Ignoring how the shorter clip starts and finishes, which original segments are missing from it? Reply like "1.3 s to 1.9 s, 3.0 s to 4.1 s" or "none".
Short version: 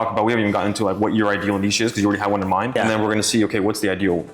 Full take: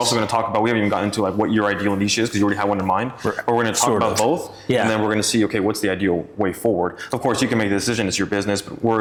3.1 s to 4.8 s

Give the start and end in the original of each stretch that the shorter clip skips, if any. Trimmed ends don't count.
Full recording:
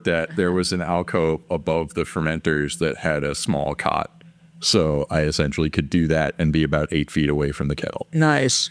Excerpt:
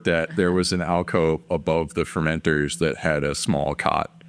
none

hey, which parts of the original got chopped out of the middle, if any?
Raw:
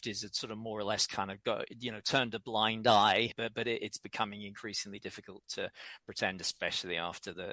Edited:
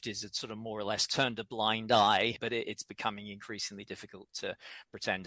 1.1 s to 2.0 s, 3.3 s to 3.5 s

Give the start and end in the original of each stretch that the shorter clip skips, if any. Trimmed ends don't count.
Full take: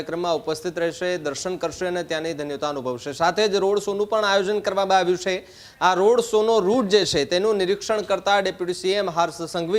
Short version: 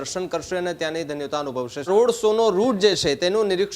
3.2 s to 6.0 s

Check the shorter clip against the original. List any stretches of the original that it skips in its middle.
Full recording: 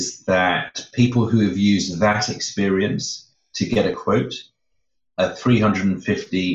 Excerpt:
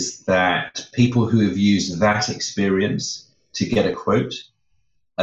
none

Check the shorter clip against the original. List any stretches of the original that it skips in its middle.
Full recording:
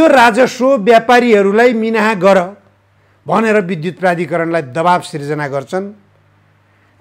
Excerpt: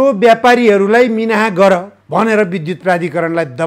2.6 s to 3.1 s

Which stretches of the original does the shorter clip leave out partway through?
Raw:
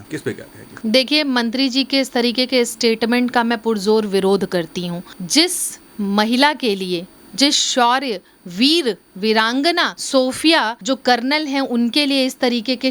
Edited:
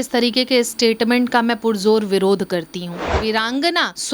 5.1 s to 9.1 s

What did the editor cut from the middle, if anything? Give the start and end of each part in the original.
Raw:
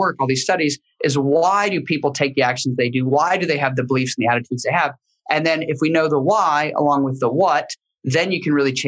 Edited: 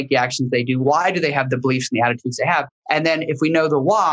5.0 s to 5.1 s

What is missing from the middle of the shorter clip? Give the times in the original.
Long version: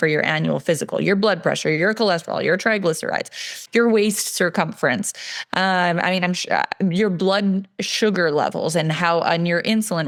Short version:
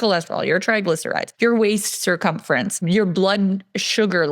3.2 s to 3.6 s, 5.2 s to 6.9 s

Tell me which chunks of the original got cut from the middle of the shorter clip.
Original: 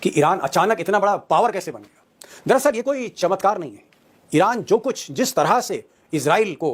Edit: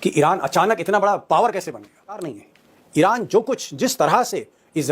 2.3 s to 3.7 s

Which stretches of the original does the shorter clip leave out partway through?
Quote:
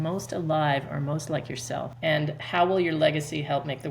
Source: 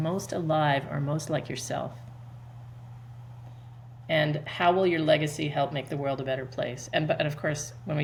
1.9 s to 4.0 s

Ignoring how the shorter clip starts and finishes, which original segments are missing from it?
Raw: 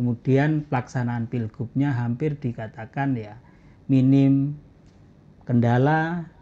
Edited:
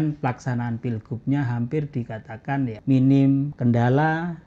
3.3 s to 3.8 s, 4.5 s to 5.4 s

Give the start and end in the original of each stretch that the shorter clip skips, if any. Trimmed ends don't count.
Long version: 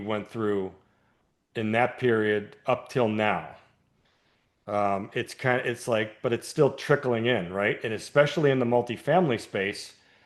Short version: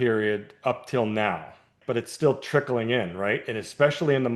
3.8 s to 6.1 s

